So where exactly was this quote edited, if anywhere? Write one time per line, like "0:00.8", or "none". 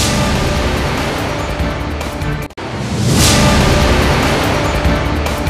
0:02.4

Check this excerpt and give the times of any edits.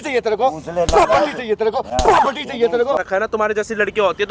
0:03.0

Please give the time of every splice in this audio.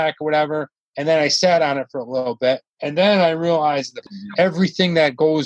0:02.7
0:04.1

